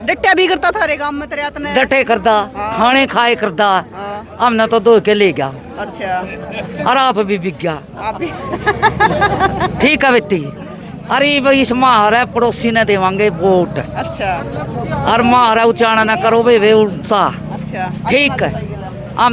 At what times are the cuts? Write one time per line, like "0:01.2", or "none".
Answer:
none